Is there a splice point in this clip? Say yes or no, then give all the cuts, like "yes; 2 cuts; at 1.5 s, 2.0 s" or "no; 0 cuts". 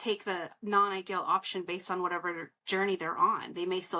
no; 0 cuts